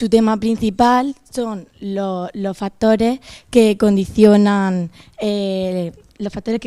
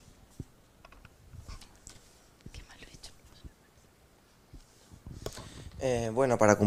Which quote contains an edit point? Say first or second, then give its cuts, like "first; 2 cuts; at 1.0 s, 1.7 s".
first; 1 cut; at 5.5 s